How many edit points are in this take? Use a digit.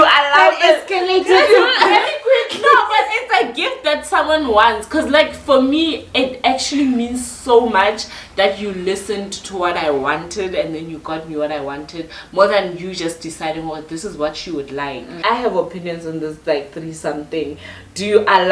0